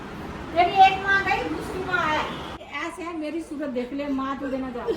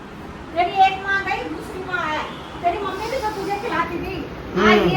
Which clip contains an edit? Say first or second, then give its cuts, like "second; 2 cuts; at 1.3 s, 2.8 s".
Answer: first; 1 cut; at 2.5 s